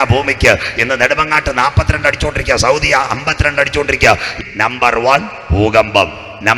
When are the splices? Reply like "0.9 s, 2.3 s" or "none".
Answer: 4.3 s